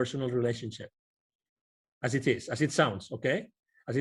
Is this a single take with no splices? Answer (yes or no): yes